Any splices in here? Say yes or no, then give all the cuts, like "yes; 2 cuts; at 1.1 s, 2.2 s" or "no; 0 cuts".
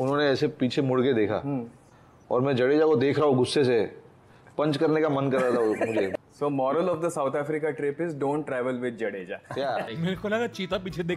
no; 0 cuts